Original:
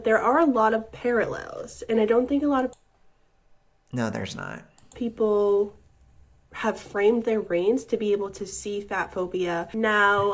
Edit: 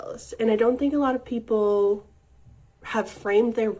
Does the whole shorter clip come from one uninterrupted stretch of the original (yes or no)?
no